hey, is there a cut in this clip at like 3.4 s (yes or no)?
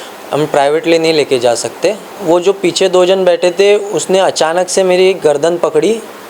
no